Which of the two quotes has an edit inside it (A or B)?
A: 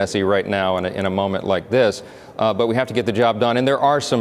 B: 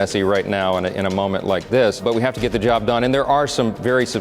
B